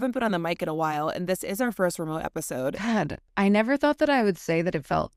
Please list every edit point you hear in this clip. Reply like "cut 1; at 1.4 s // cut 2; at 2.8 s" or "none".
cut 1; at 2.8 s